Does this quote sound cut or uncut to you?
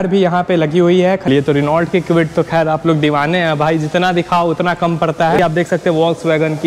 cut